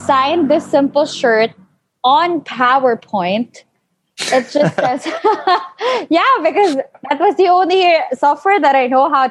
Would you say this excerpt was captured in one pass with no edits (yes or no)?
yes